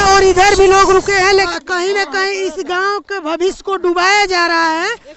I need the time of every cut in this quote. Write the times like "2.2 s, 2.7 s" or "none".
1.3 s